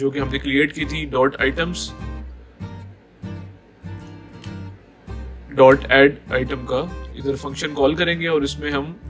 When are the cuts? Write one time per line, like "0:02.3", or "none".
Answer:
none

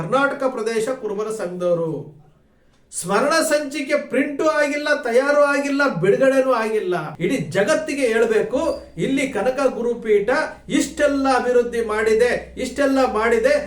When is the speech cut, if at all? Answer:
0:07.1

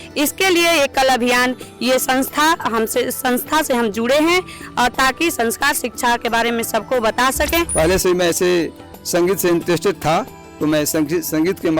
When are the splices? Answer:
0:07.7

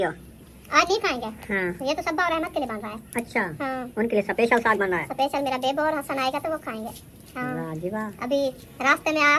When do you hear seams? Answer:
none

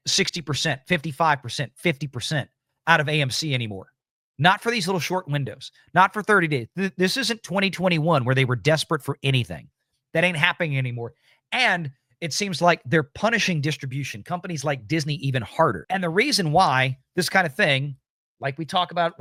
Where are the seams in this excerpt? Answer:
none

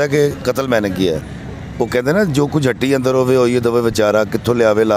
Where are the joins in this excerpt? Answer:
0:01.3

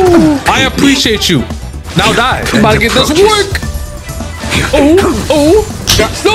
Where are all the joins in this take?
0:02.4

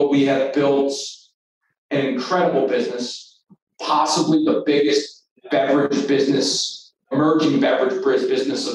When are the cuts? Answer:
0:07.1

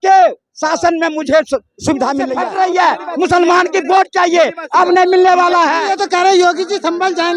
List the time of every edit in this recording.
0:02.4
0:06.0

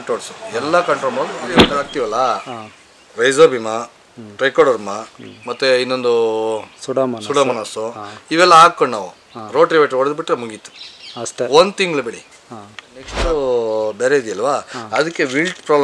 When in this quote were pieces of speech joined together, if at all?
0:01.8
0:13.3

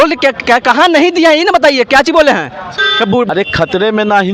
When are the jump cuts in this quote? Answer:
0:03.3

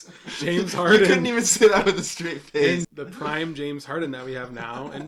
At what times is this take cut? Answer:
0:02.9

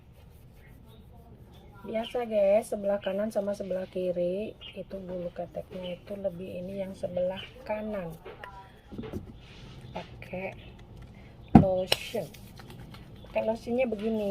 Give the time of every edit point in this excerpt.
0:09.0

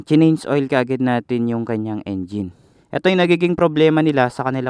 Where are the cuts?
0:03.0

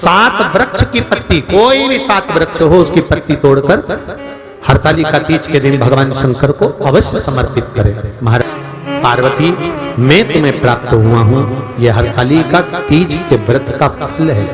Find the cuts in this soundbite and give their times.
0:08.4

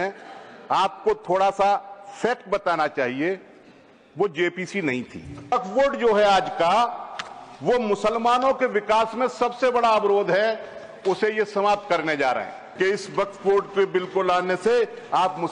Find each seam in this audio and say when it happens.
0:05.5
0:12.6

